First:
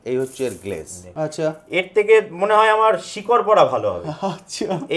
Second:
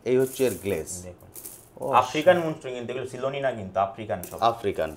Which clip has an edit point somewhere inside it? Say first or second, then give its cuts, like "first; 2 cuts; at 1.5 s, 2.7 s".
first; 1 cut; at 1.0 s